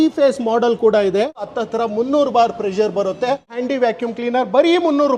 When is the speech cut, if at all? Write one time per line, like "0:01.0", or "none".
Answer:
0:03.6